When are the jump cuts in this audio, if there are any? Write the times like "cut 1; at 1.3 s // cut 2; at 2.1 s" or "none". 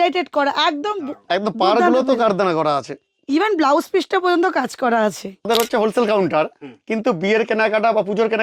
cut 1; at 5.5 s